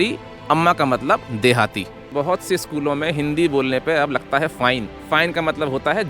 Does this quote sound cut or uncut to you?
cut